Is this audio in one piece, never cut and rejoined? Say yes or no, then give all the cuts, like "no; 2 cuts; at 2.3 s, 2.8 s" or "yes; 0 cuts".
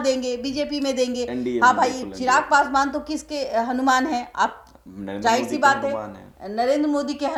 yes; 0 cuts